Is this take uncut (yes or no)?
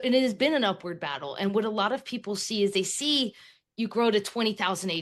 yes